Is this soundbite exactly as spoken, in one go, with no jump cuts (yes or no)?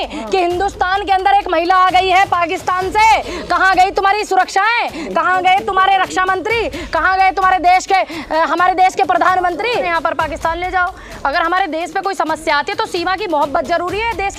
no